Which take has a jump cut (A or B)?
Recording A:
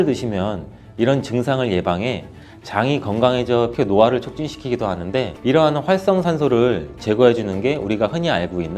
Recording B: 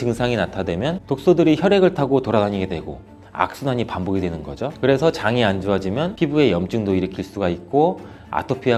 A